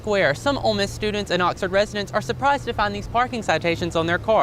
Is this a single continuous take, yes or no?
yes